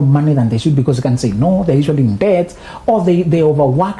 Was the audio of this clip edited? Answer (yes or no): no